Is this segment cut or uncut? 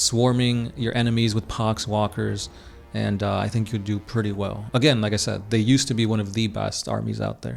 uncut